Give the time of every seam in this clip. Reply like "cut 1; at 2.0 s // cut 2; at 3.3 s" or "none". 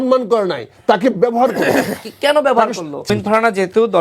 cut 1; at 3.1 s